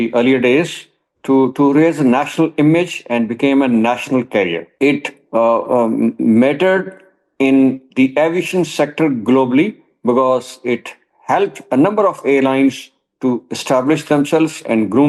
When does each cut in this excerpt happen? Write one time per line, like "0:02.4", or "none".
0:04.7

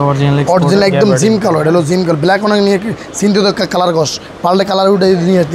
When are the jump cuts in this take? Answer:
none

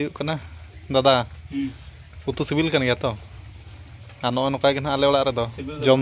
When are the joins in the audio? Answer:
none

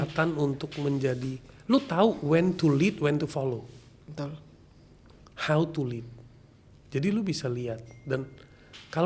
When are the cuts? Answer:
none

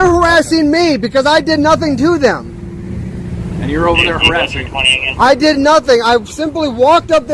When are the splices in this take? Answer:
0:03.2

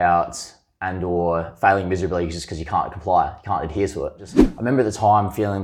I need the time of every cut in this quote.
0:04.4

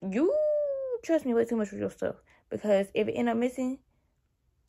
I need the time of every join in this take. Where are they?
none

